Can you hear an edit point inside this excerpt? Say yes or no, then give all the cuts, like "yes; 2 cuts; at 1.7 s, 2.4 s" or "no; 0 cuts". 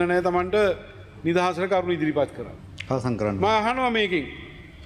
no; 0 cuts